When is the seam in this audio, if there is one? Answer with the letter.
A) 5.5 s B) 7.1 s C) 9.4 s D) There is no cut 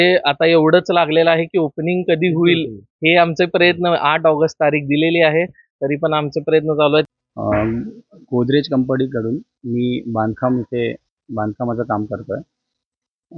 B